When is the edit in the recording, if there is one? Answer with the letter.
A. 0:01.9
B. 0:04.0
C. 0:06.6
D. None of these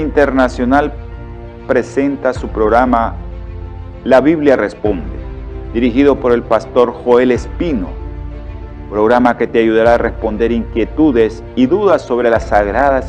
A